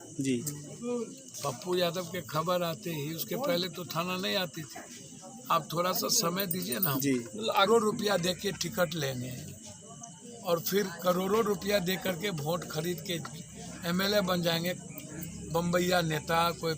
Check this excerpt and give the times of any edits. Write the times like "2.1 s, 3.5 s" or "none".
7.7 s